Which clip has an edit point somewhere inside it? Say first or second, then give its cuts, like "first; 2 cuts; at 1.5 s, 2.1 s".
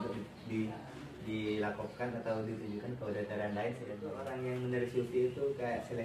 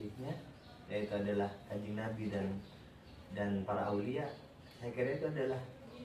first; 1 cut; at 4.2 s